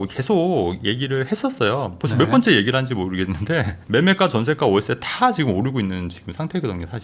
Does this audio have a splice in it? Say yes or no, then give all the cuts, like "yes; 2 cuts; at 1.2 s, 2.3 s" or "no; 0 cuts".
yes; 1 cut; at 3.8 s